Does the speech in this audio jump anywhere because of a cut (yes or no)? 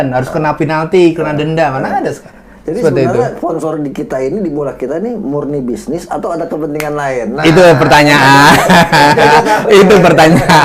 no